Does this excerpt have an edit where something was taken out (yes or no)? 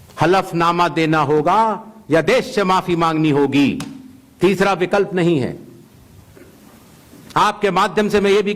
no